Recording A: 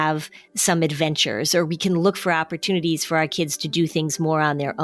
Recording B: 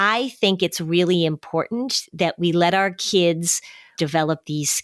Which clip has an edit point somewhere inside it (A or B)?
B